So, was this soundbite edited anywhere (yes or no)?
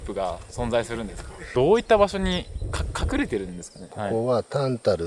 yes